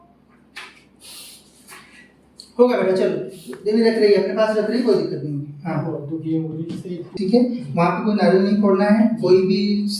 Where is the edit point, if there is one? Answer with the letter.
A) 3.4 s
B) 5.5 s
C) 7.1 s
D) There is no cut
C